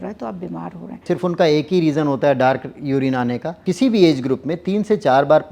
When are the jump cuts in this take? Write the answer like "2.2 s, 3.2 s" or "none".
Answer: 1.0 s, 3.6 s